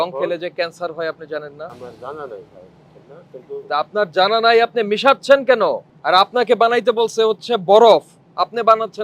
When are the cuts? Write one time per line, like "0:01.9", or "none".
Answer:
0:01.7
0:05.9